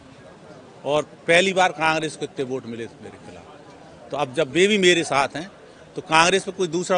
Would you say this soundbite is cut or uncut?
uncut